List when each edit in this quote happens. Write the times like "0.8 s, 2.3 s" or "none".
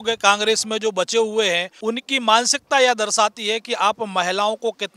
1.7 s